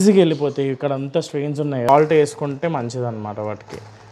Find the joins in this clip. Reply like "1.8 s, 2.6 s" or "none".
1.9 s